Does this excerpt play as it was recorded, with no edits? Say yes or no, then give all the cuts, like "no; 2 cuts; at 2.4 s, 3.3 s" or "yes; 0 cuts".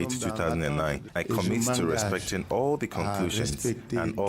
no; 1 cut; at 1.1 s